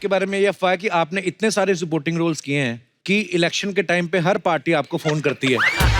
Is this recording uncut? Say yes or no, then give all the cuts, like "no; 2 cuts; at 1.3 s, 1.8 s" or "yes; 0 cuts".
no; 1 cut; at 2.9 s